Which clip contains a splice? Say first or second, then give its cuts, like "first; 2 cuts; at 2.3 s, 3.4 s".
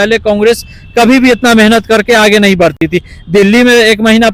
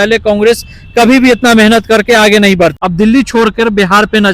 second; 1 cut; at 2.7 s